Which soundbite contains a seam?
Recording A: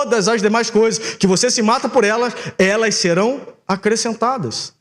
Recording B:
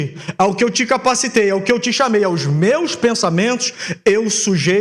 A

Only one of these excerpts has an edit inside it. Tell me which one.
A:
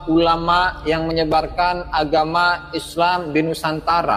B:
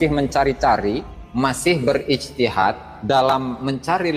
B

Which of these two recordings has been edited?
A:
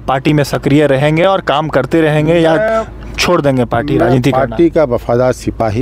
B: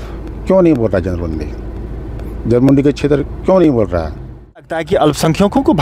B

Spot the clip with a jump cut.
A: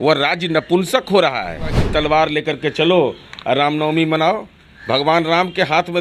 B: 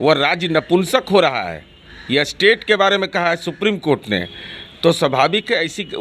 A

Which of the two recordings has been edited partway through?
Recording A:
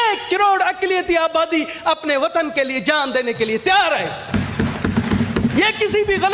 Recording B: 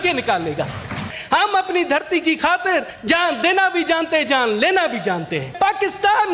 B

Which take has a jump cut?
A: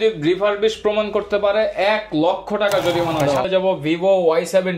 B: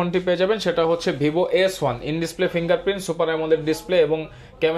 A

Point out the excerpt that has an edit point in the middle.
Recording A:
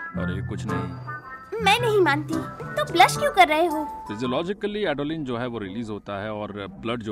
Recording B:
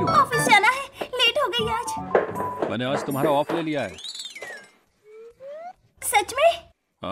A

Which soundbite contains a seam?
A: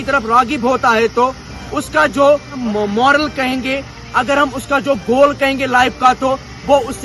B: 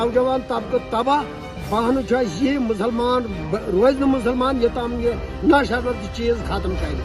A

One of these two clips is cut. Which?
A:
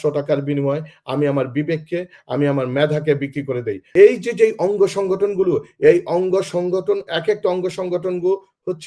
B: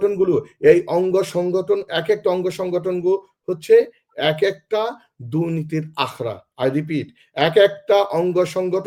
A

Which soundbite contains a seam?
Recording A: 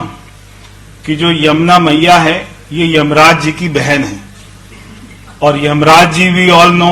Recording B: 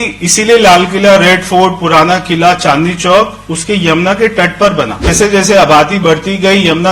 B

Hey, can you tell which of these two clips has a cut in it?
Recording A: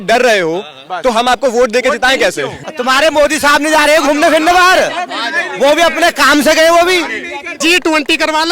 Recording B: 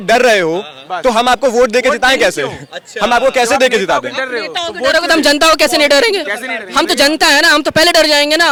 A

